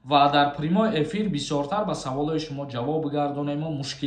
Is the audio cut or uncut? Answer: uncut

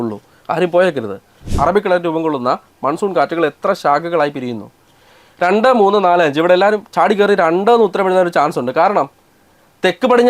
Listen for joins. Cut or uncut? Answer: cut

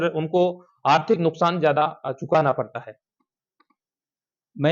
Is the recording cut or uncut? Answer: uncut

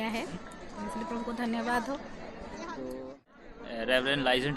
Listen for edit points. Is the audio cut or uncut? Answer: cut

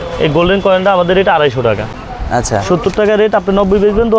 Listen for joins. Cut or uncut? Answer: cut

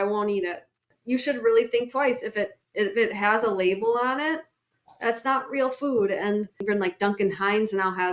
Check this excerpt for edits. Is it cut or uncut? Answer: cut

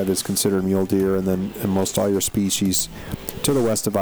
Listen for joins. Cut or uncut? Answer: uncut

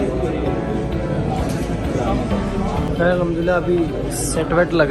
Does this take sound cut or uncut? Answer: cut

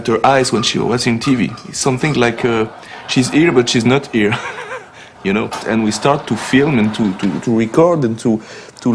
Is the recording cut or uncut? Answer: cut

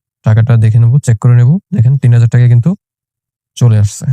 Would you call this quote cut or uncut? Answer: uncut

